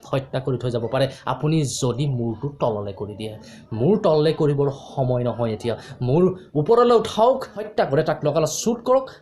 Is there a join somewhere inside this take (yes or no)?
yes